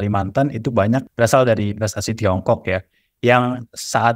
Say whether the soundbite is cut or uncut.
cut